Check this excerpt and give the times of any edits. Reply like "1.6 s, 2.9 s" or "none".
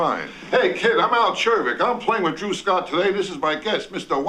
none